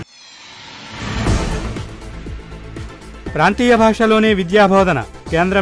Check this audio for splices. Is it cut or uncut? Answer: uncut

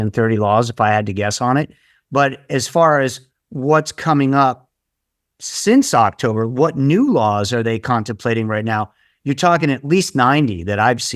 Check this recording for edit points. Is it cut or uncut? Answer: uncut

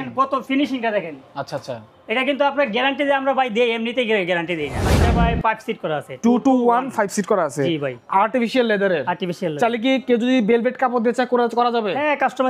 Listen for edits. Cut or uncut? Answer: cut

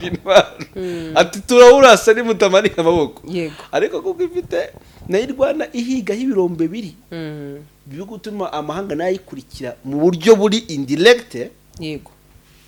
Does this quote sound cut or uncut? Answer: uncut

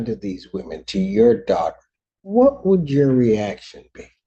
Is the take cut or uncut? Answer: uncut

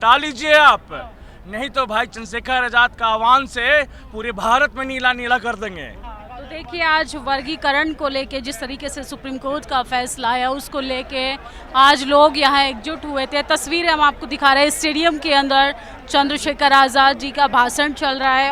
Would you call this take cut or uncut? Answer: uncut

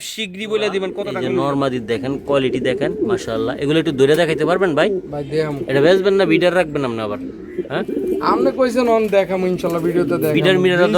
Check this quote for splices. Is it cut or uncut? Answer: cut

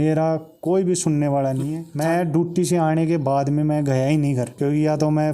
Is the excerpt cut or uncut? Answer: cut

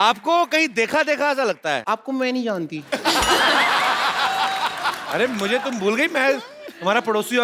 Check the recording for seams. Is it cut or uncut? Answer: cut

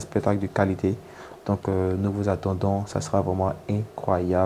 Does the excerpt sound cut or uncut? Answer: uncut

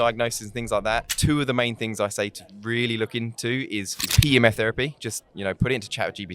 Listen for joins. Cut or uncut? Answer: cut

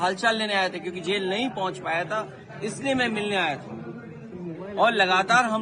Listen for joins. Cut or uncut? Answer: uncut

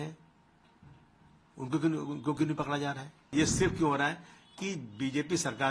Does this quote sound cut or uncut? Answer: cut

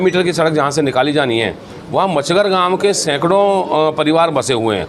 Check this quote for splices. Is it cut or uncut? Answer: uncut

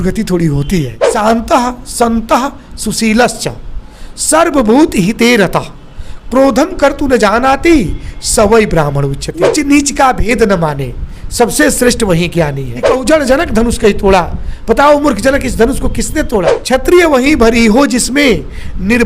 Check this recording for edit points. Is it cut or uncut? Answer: cut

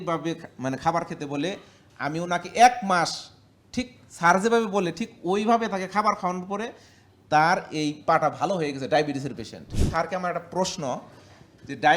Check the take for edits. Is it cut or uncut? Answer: cut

